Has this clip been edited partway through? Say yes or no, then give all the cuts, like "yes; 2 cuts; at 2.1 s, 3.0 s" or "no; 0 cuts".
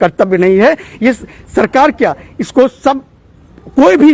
no; 0 cuts